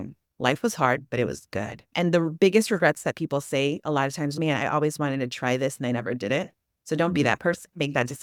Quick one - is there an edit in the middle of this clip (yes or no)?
no